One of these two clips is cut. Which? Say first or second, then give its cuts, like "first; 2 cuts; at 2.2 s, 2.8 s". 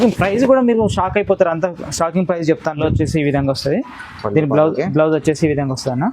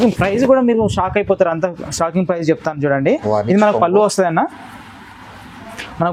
first; 1 cut; at 2.8 s